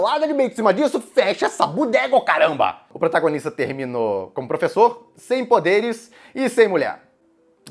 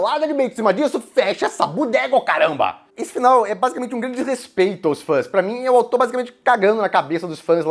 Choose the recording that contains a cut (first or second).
first